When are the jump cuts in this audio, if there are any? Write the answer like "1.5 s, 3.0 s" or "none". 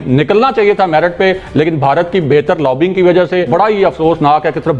3.5 s